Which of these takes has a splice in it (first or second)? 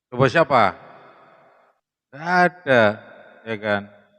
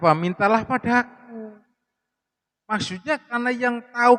first